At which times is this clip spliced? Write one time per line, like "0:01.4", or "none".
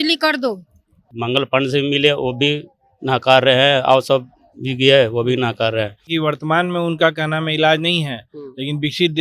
0:01.1
0:06.1